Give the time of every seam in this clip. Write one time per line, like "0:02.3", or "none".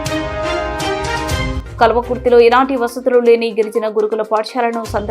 0:01.5